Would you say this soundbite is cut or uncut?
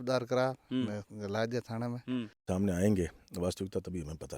cut